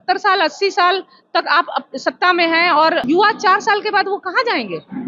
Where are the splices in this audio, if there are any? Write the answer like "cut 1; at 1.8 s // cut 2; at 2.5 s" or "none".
none